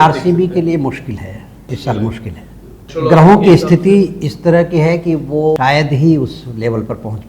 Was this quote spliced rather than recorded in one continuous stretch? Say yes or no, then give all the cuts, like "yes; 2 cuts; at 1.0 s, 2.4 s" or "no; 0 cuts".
yes; 3 cuts; at 1.7 s, 2.9 s, 5.6 s